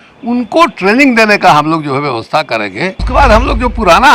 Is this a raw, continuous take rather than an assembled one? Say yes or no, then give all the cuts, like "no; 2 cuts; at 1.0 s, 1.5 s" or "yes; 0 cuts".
no; 1 cut; at 3.0 s